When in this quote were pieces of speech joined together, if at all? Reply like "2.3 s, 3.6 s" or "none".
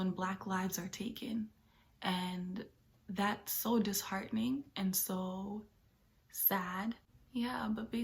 7.1 s